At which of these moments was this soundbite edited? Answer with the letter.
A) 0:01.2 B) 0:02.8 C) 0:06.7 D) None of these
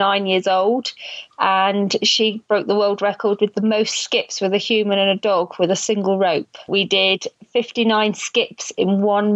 C